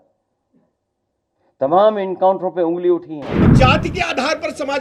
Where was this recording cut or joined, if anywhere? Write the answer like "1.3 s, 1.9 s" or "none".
3.5 s